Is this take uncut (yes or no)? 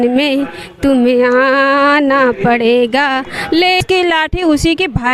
no